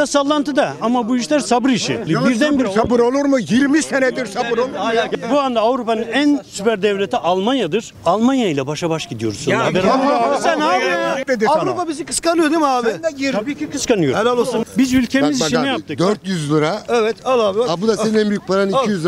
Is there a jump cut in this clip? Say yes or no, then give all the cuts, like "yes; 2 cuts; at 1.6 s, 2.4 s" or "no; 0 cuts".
yes; 4 cuts; at 2.0 s, 5.1 s, 11.2 s, 14.6 s